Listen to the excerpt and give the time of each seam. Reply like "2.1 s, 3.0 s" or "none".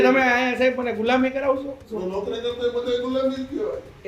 1.9 s